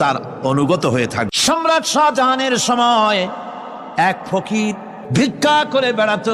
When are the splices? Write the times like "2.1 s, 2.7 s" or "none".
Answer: 1.3 s, 4.9 s